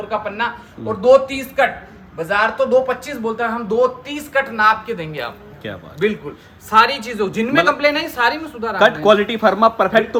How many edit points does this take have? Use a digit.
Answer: 0